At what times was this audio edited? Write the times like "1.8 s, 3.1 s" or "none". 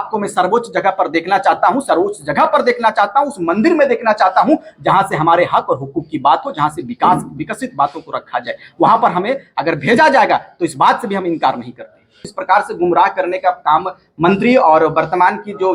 12.3 s